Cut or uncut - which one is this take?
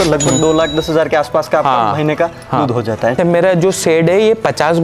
cut